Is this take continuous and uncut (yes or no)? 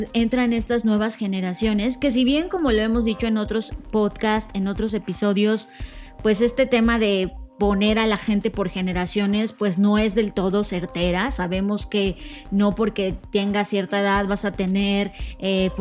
yes